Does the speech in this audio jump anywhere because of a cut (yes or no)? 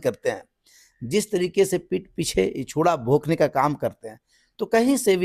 no